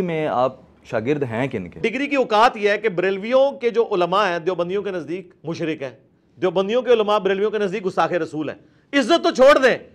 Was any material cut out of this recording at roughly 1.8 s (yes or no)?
yes